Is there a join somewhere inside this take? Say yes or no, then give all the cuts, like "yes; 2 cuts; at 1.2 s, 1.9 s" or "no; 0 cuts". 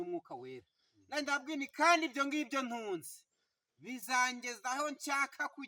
no; 0 cuts